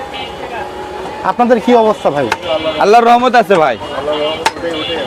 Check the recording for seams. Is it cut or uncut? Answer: uncut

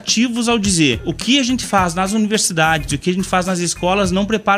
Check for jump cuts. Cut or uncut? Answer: cut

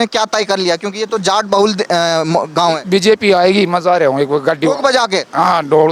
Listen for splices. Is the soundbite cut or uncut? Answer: uncut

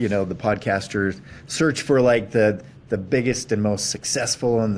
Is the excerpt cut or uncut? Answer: uncut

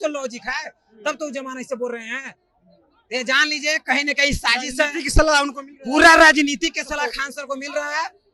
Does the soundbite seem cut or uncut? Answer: uncut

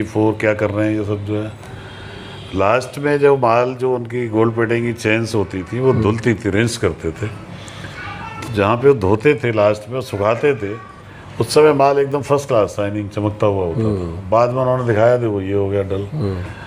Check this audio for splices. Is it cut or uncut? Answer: uncut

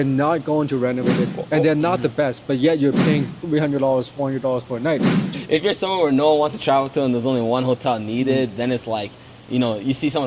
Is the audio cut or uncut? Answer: cut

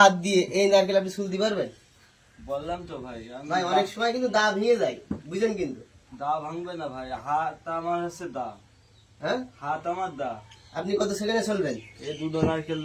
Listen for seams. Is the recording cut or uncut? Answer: uncut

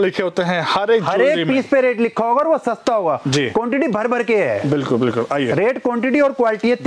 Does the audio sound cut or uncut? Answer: uncut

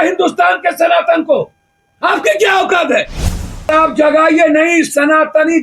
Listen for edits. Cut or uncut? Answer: cut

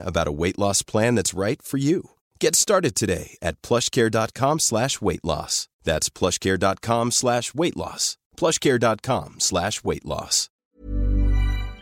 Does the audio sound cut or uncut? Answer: cut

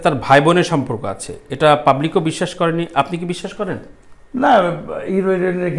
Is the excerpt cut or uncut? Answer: uncut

